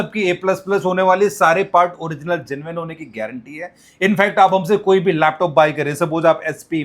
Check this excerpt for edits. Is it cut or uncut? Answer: uncut